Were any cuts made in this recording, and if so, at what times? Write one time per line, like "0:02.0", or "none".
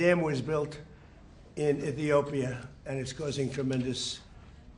none